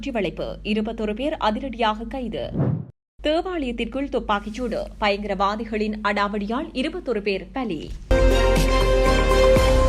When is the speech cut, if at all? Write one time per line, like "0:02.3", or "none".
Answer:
0:07.9